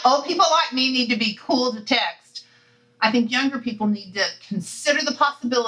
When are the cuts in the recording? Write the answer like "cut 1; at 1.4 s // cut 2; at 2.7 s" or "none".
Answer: none